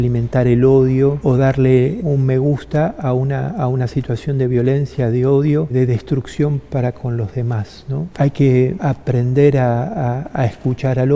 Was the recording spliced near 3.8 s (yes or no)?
no